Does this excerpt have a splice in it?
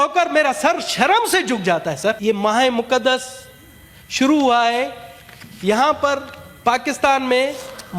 yes; 1 cut; at 2.2 s

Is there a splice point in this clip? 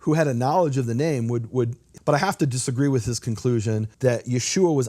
yes; 2 cuts; at 1.8 s, 3.9 s

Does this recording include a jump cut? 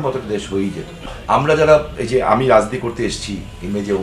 yes; 1 cut; at 0.9 s

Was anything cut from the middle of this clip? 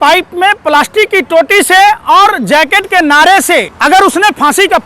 yes; 1 cut; at 3.7 s

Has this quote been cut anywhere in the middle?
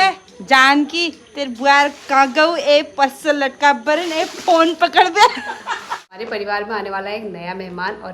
yes; 1 cut; at 6.0 s

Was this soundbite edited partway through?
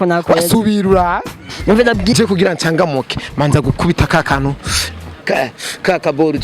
yes; 1 cut; at 2.1 s

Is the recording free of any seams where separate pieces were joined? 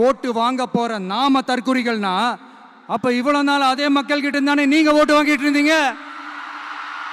yes; 0 cuts

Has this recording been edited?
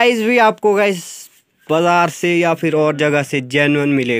no; 0 cuts

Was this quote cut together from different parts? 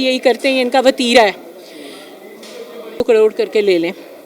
yes; 1 cut; at 3.0 s

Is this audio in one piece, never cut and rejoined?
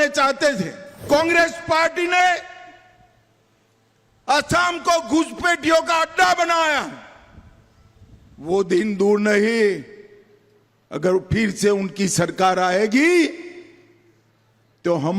no; 1 cut; at 1.0 s

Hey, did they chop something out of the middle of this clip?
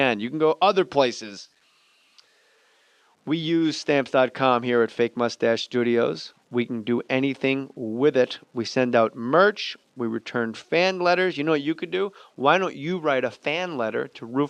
no; 0 cuts

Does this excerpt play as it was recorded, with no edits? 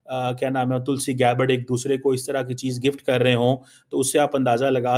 yes; 0 cuts

